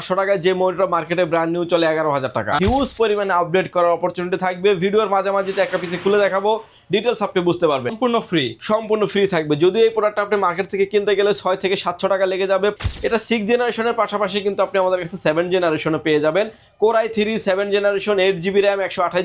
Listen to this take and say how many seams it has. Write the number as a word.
three